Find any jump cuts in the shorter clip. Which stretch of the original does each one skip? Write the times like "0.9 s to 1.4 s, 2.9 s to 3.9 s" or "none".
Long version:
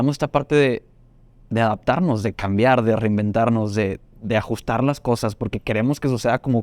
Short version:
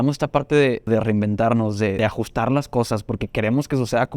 0.9 s to 2.8 s, 3.9 s to 4.3 s